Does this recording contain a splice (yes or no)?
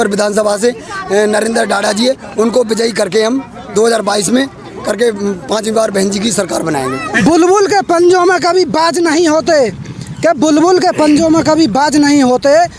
yes